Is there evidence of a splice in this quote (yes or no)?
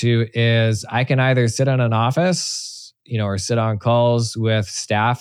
no